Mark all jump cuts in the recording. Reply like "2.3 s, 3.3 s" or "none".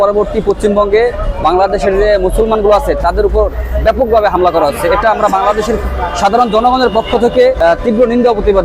7.6 s